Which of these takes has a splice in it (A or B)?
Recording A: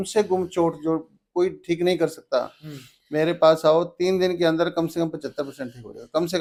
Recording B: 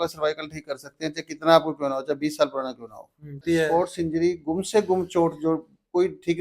B